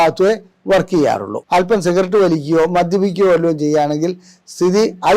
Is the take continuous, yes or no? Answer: no